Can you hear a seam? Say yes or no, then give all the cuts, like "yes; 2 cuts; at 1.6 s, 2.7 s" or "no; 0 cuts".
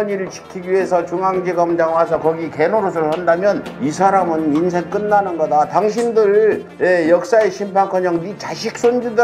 no; 0 cuts